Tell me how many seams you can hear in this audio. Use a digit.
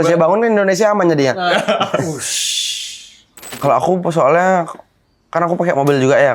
1